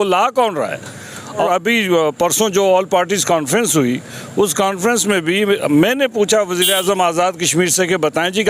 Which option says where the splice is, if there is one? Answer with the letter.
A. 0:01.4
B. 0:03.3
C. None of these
A